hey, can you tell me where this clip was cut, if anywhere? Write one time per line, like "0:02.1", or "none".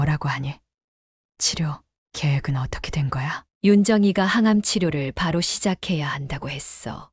0:03.4